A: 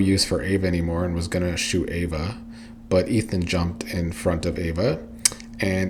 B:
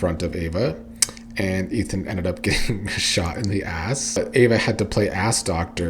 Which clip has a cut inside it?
B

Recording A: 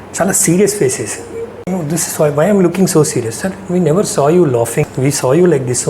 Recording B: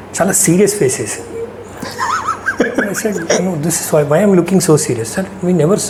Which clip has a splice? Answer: A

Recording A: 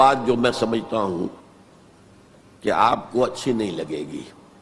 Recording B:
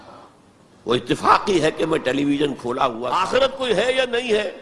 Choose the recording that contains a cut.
B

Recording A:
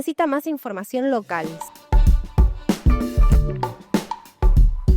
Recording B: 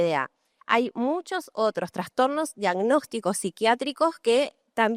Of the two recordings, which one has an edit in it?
A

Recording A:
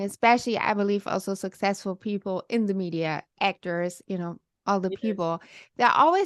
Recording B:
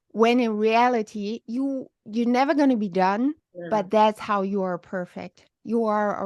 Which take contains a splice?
B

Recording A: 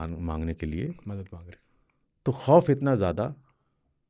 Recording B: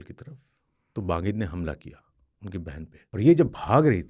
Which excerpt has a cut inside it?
B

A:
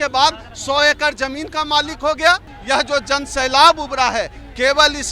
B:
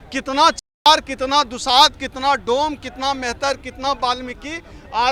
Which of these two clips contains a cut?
A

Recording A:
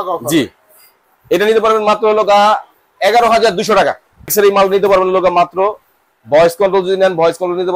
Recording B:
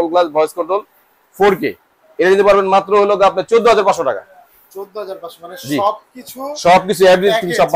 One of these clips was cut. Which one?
A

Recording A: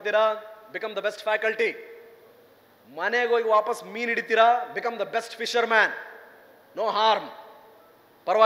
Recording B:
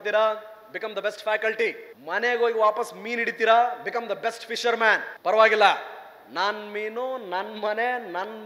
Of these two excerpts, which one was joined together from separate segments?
B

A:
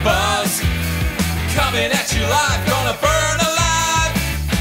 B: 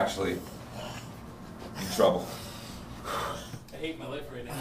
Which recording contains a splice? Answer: B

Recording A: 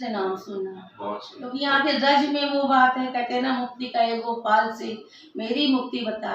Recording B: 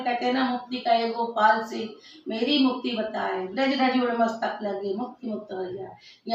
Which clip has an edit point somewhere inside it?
A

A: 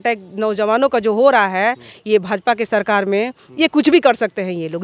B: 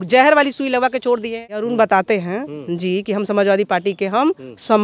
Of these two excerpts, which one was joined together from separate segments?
B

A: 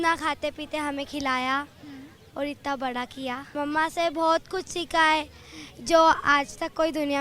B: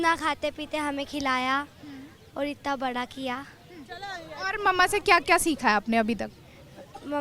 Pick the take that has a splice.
A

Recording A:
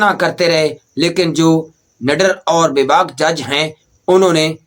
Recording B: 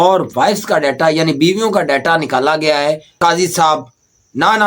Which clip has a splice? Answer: B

